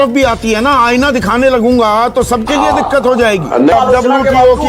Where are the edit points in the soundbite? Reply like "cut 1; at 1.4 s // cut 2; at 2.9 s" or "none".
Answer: cut 1; at 3.7 s